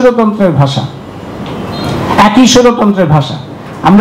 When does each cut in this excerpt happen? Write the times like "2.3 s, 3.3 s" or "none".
none